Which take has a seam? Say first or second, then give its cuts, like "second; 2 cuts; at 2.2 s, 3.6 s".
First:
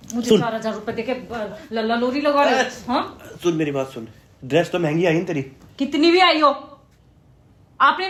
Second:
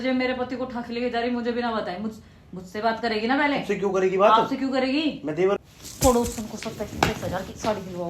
second; 1 cut; at 5.6 s